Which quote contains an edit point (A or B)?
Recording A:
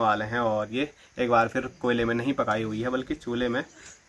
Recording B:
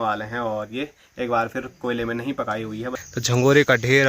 B